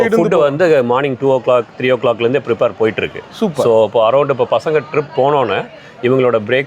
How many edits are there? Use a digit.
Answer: 0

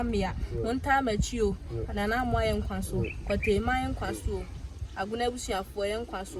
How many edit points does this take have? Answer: 0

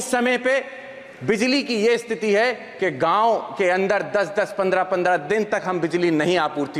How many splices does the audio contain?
0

